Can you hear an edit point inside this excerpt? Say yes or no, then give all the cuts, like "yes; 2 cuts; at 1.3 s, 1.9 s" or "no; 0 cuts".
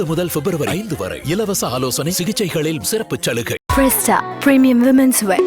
yes; 1 cut; at 3.6 s